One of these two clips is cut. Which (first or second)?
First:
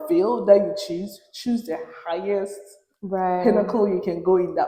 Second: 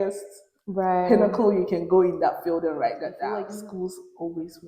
second